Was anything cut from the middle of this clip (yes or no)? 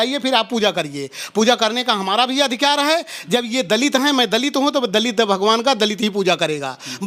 no